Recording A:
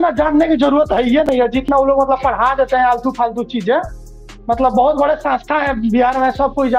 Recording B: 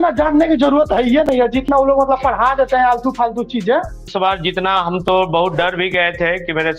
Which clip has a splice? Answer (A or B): B